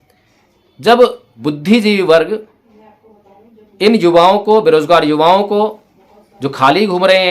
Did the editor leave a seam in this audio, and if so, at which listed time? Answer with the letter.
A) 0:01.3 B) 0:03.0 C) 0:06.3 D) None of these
A